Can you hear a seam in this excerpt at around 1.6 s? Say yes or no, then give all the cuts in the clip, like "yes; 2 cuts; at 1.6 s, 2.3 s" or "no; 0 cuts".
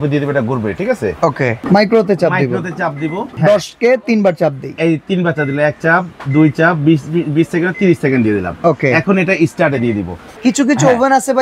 yes; 3 cuts; at 1.6 s, 3.3 s, 10.2 s